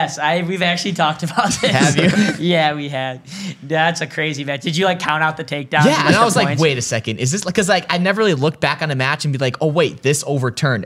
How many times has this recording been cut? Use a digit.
0